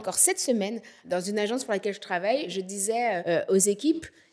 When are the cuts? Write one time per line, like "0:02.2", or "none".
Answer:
0:00.9
0:02.9